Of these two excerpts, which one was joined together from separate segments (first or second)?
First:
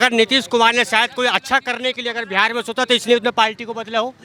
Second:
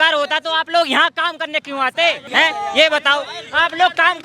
second